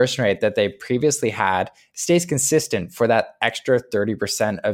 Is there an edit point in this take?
no; 0 cuts

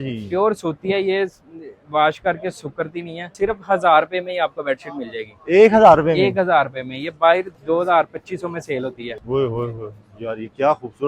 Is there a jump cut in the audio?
yes; 3 cuts; at 3.3 s, 7.5 s, 9.1 s

